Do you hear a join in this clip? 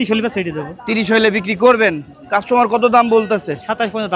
no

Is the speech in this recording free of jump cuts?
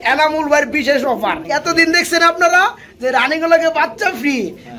no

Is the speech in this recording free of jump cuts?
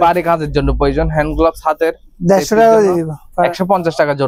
yes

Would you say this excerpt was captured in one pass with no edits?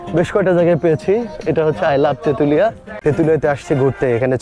no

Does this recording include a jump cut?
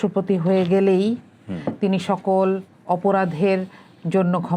no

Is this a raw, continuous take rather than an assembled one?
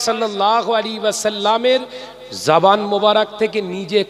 yes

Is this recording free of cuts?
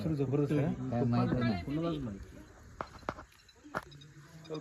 yes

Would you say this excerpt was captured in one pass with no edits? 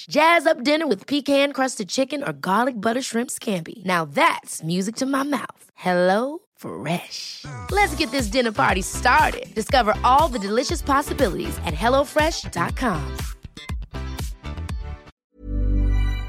no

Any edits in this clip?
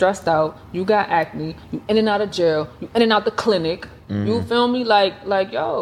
no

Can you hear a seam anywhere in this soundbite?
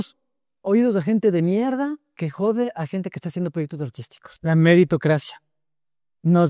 no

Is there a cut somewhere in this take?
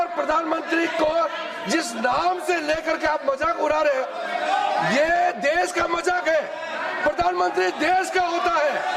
no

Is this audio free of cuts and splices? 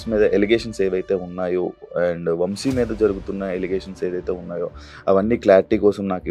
yes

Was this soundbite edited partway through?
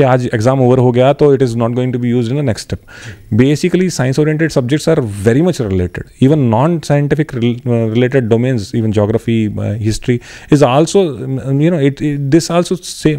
no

